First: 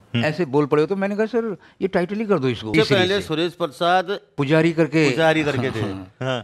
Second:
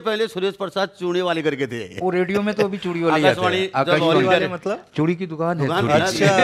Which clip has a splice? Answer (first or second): first